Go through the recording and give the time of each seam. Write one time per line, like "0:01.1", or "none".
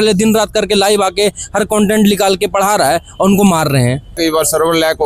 0:04.1

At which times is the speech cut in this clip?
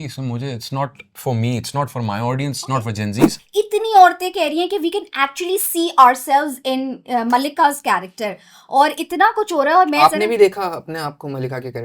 0:03.4

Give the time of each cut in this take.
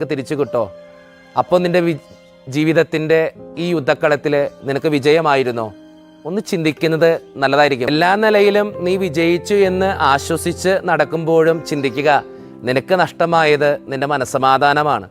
0:07.9

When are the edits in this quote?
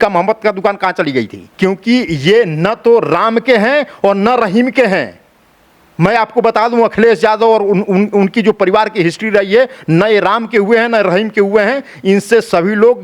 0:01.4

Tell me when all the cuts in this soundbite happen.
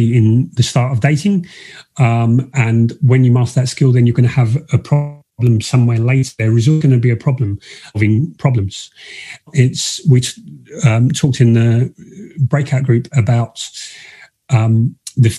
0:05.2

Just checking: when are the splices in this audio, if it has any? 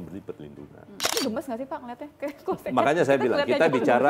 0:01.0

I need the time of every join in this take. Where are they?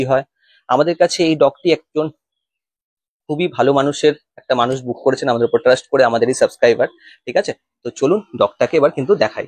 none

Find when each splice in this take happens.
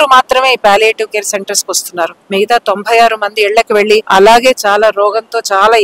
0:04.1

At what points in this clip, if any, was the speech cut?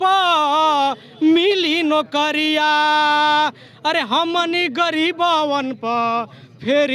none

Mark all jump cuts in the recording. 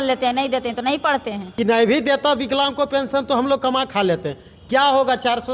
0:01.4

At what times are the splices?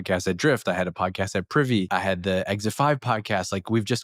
0:01.9

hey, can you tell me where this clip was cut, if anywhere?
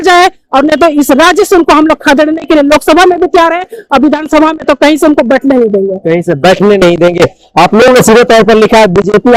none

